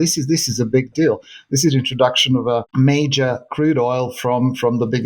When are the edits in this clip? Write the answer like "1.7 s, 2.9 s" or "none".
2.7 s

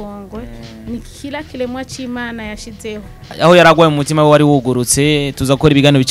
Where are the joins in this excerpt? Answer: 3.2 s

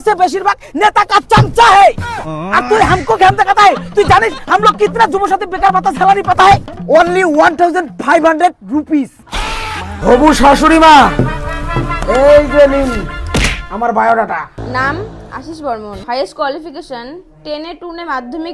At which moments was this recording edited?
9.9 s, 14.6 s, 16.0 s

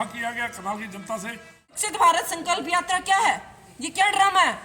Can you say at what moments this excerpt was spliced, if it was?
1.7 s

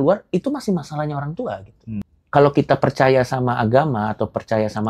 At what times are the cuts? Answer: 2.1 s

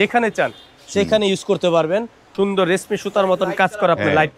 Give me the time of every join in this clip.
2.2 s

